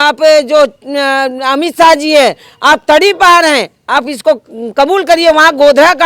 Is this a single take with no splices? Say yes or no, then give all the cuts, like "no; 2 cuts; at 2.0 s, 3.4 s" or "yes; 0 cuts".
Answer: yes; 0 cuts